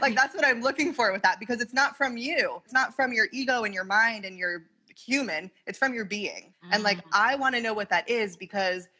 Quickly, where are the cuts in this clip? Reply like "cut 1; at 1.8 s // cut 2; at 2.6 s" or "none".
cut 1; at 2.7 s // cut 2; at 6.5 s